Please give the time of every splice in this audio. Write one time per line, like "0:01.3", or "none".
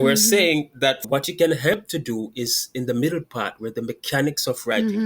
0:01.0